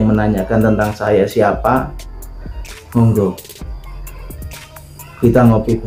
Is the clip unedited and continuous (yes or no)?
yes